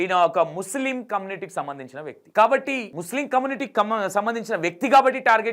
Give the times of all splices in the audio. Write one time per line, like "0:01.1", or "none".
0:02.2
0:02.9